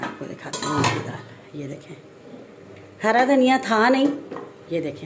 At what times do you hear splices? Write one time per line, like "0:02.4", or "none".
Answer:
none